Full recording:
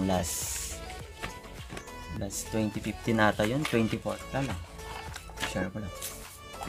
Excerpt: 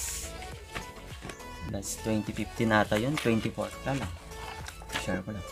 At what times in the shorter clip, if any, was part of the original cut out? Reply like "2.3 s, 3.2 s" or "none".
none